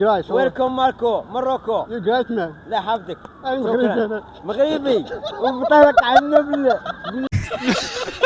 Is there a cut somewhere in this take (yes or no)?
no